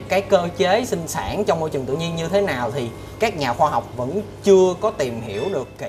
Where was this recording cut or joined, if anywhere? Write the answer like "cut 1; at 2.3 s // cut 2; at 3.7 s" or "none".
none